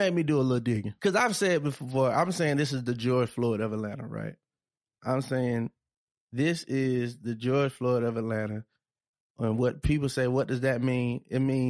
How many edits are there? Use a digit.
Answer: 1